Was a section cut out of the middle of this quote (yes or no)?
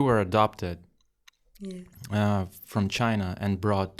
no